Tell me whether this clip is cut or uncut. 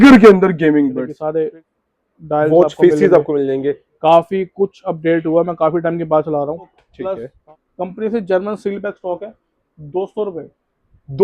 cut